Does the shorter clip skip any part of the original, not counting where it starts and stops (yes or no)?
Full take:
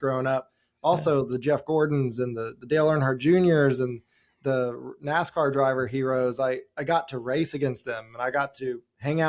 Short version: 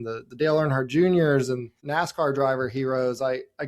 yes